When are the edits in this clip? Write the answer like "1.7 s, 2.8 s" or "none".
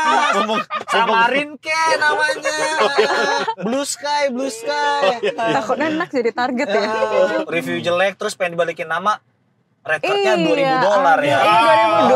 5.4 s, 7.3 s